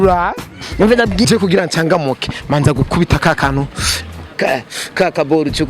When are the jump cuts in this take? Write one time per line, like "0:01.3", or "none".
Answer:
0:01.3